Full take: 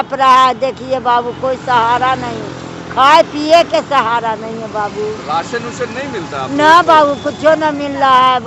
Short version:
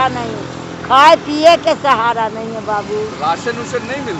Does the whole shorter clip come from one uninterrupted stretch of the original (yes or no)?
yes